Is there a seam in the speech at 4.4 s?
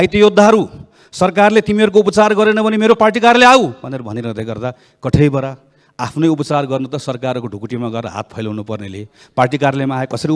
no; 0 cuts

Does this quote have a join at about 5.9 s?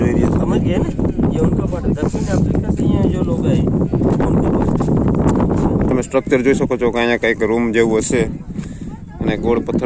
yes; 1 cut; at 5.9 s

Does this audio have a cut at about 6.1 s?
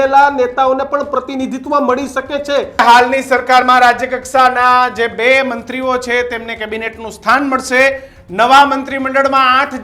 no; 1 cut; at 2.8 s

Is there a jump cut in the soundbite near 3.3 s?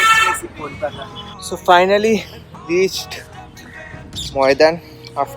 no; 1 cut; at 1.3 s

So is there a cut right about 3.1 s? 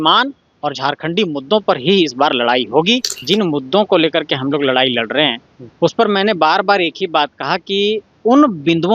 yes; 1 cut; at 3.1 s

